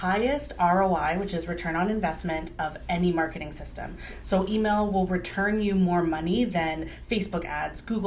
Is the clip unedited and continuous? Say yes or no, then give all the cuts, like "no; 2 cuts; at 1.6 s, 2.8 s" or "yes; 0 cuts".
yes; 0 cuts